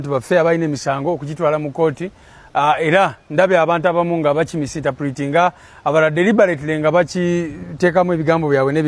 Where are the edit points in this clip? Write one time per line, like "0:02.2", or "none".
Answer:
none